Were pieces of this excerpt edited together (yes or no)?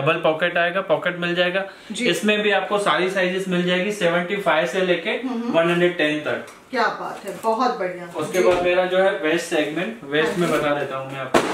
no